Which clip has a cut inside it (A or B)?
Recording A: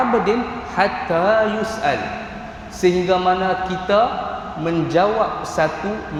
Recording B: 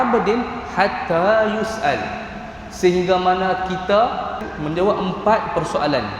B